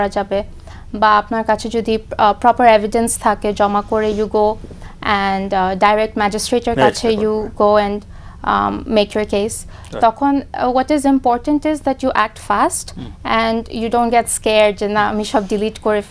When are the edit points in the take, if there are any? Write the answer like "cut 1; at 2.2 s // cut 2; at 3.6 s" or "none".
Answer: none